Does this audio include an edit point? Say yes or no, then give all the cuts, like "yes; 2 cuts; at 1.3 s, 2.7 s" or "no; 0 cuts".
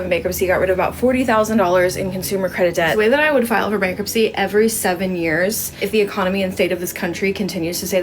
yes; 2 cuts; at 2.9 s, 5.7 s